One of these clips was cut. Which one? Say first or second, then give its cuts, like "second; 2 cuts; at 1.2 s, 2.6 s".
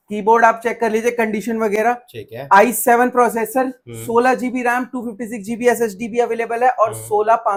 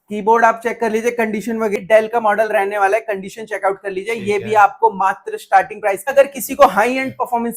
second; 2 cuts; at 1.8 s, 6.1 s